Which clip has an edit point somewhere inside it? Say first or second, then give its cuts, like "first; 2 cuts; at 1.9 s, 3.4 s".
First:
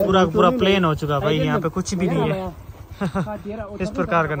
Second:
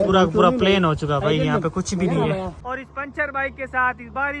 second; 1 cut; at 2.6 s